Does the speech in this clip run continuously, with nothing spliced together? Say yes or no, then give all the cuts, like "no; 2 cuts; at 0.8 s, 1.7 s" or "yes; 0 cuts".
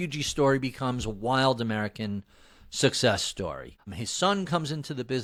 yes; 0 cuts